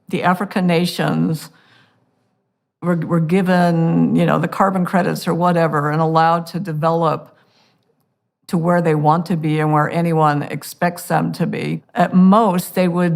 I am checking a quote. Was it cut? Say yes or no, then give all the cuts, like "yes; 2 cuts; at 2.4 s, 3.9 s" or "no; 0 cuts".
yes; 1 cut; at 11.8 s